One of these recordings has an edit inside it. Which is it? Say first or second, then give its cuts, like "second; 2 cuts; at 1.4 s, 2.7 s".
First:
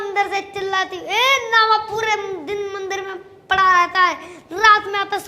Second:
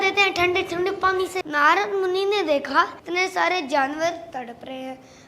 second; 2 cuts; at 1.4 s, 3.0 s